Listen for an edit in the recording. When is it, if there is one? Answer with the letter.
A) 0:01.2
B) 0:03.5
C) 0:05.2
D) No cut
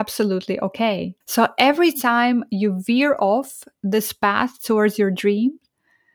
A